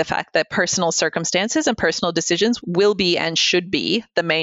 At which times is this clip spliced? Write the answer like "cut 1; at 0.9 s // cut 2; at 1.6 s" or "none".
none